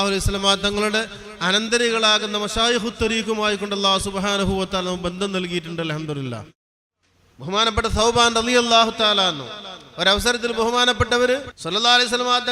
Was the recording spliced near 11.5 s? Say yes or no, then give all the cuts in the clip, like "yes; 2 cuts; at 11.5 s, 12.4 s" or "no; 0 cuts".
yes; 2 cuts; at 6.6 s, 11.5 s